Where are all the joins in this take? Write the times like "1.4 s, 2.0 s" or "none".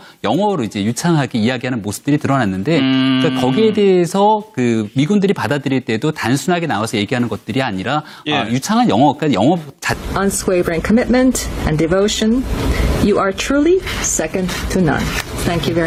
none